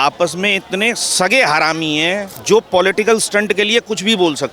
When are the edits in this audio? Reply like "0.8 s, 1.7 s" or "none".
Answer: 2.3 s